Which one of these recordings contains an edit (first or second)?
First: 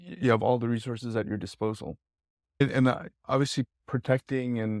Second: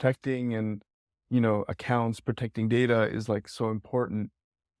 first